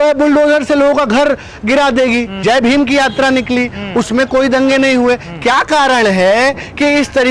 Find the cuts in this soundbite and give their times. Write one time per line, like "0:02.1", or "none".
0:02.3